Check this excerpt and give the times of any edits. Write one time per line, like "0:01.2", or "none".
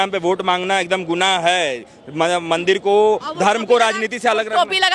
none